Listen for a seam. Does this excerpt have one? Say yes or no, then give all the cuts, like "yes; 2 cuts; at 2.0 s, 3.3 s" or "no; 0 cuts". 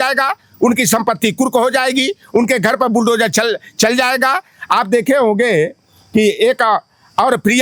no; 0 cuts